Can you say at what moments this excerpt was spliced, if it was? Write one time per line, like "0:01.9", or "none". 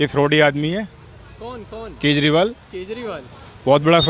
none